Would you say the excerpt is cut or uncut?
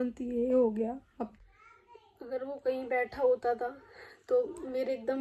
cut